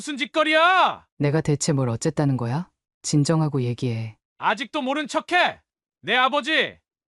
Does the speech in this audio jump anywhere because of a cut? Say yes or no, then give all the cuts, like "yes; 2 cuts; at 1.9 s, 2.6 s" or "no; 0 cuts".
yes; 1 cut; at 1.0 s